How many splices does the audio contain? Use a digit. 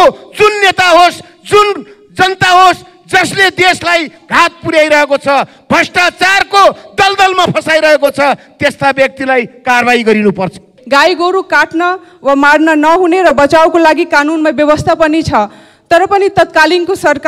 1